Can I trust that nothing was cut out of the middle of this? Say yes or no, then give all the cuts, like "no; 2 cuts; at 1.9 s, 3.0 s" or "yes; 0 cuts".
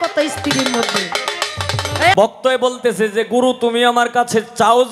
no; 1 cut; at 2.3 s